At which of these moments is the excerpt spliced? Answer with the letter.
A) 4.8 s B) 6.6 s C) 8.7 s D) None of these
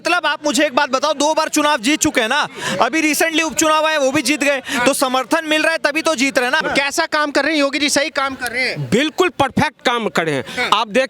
B